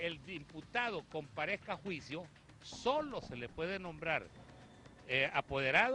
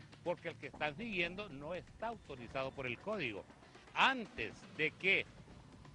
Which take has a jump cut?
second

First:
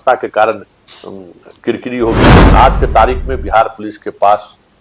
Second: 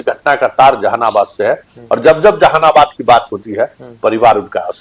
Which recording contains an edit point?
first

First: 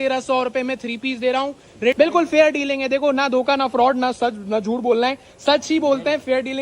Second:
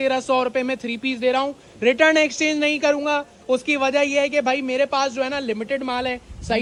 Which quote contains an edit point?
first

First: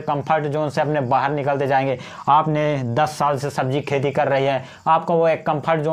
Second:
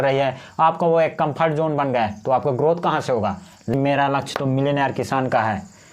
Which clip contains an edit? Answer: second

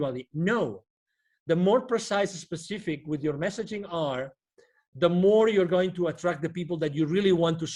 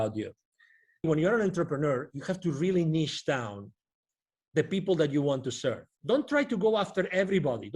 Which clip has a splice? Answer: second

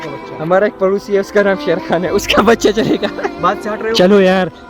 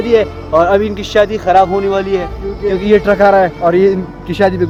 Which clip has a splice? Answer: first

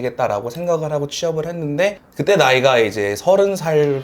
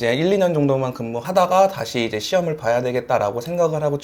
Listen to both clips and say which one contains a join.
first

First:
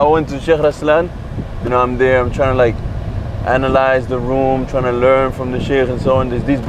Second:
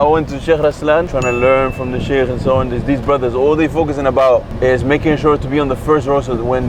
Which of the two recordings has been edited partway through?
second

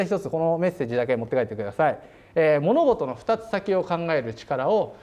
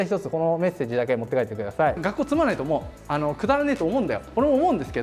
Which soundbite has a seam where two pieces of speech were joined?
second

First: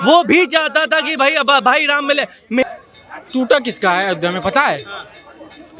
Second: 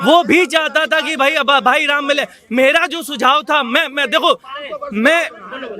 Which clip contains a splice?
first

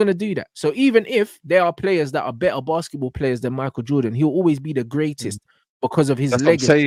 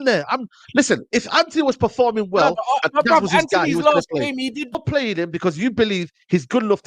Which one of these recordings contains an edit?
second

